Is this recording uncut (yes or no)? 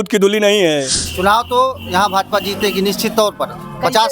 no